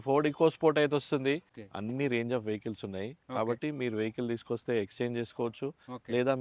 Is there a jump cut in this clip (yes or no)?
yes